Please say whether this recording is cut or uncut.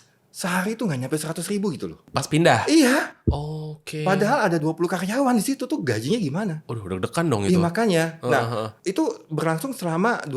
uncut